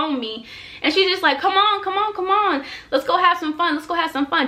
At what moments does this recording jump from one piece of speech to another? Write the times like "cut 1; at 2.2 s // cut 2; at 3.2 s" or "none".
none